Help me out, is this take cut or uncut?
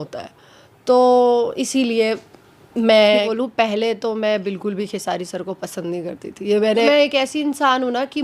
cut